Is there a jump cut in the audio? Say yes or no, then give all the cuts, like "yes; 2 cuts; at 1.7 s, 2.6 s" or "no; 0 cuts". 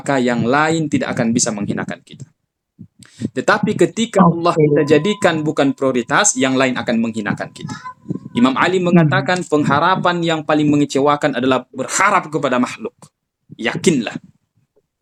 no; 0 cuts